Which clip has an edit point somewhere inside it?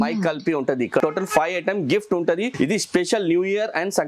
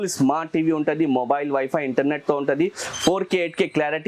first; 2 cuts; at 1.0 s, 2.5 s

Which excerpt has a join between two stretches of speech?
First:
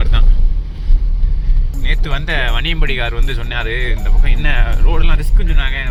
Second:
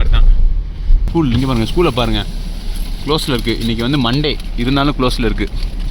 second; 1 cut; at 1.1 s

